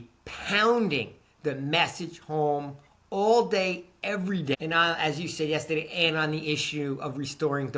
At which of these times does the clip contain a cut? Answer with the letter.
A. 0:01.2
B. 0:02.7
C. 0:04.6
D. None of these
C